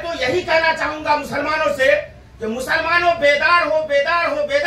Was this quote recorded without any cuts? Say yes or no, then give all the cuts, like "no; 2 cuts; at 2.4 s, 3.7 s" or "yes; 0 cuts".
yes; 0 cuts